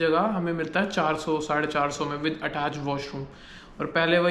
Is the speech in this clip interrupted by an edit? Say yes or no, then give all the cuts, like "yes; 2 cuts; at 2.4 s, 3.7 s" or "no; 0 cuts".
no; 0 cuts